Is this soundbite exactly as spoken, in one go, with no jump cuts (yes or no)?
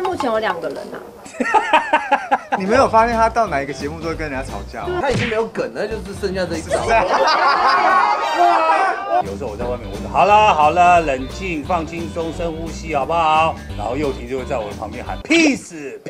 no